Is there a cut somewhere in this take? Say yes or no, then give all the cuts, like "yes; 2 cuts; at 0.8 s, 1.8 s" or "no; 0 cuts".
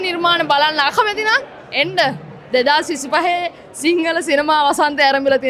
no; 0 cuts